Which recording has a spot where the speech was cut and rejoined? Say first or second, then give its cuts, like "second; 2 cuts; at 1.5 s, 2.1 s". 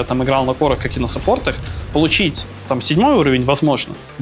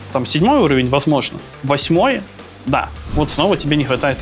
second; 1 cut; at 3.0 s